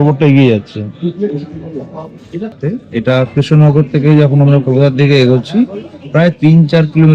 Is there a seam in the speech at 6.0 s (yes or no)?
no